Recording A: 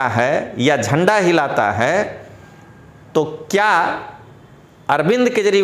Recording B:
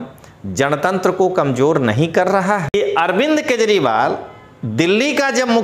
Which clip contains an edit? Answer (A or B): B